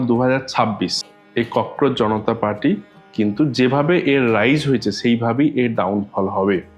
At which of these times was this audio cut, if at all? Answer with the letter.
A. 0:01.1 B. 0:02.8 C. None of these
A